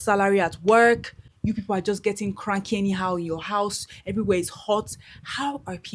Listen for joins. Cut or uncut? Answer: uncut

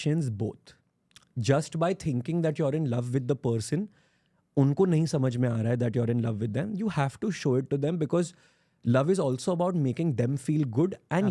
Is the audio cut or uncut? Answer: uncut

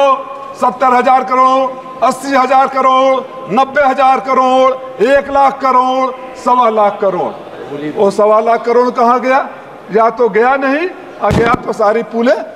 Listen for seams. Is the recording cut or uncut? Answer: uncut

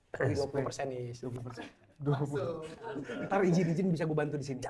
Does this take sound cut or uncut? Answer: uncut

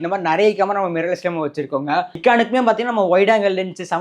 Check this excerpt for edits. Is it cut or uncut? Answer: cut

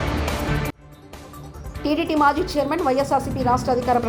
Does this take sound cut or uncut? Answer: uncut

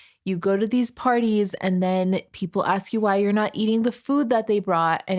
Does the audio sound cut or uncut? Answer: uncut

